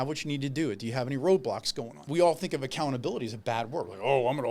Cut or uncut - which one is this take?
cut